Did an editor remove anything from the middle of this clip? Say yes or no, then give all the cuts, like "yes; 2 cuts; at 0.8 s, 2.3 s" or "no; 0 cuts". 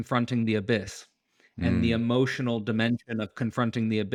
no; 0 cuts